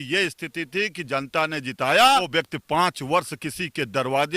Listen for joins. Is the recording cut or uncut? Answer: cut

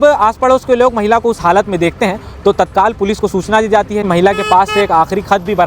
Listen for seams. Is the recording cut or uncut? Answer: cut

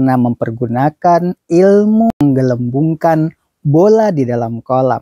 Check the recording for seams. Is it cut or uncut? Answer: cut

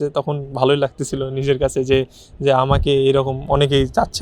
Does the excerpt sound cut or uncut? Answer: uncut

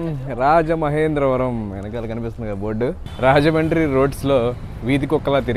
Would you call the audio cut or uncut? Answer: cut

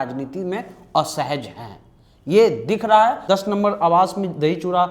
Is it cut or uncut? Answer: cut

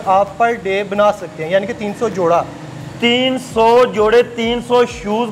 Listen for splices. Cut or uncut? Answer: uncut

